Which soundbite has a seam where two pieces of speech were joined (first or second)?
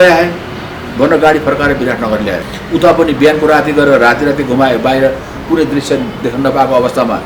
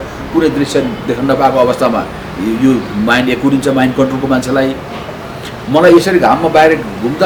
first